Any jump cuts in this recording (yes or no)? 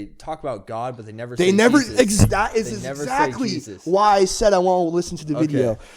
no